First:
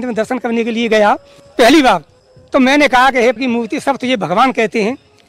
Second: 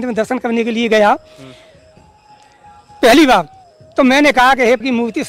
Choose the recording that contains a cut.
first; 1 cut; at 1.4 s

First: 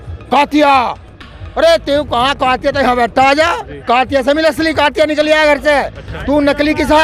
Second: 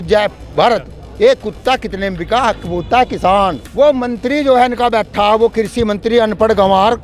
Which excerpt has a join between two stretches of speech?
second; 1 cut; at 3.6 s

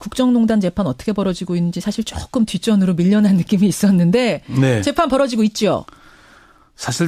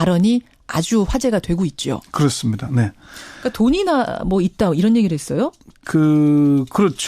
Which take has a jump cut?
second; 1 cut; at 4.1 s

